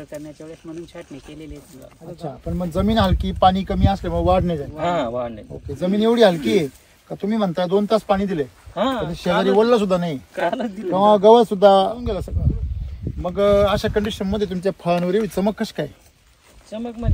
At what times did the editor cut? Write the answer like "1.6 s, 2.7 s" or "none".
12.3 s